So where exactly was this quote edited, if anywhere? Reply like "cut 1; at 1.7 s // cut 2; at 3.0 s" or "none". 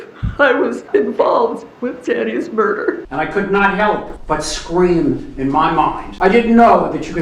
cut 1; at 0.8 s // cut 2; at 1.7 s // cut 3; at 3.1 s // cut 4; at 4.1 s // cut 5; at 6.0 s

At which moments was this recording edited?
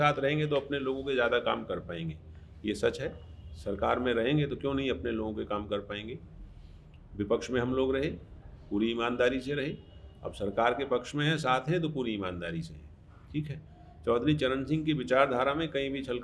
none

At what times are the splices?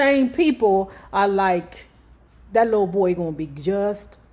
none

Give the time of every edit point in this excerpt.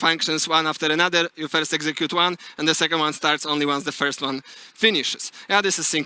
none

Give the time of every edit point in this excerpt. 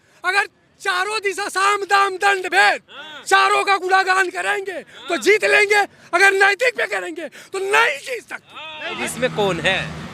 cut 1; at 9.0 s

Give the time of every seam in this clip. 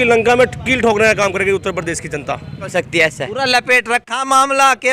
cut 1; at 2.7 s

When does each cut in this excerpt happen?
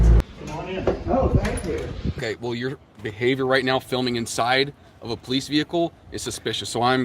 cut 1; at 2.2 s

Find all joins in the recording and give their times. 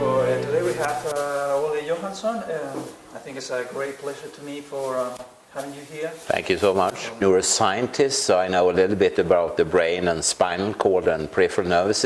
none

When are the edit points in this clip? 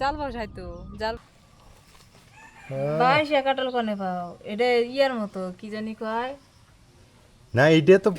cut 1; at 1.2 s

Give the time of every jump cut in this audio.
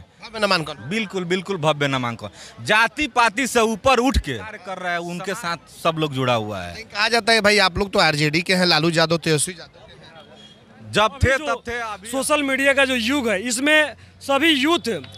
cut 1; at 4.7 s // cut 2; at 11.8 s

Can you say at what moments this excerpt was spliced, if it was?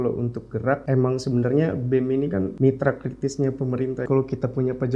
cut 1; at 0.8 s // cut 2; at 2.5 s // cut 3; at 4.1 s

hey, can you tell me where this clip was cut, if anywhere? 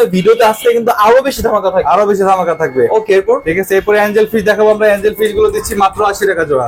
none

